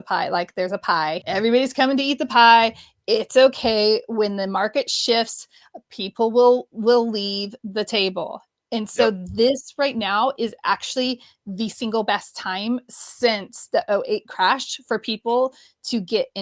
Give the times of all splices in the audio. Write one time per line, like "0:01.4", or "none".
0:01.2

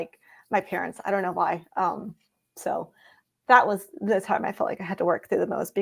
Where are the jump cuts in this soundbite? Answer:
none

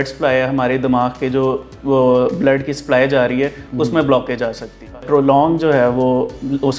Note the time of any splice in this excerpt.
0:05.0

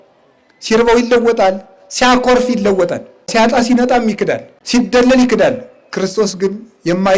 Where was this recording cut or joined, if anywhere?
0:03.3
0:04.5

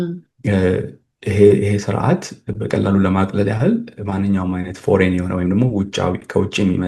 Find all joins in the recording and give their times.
none

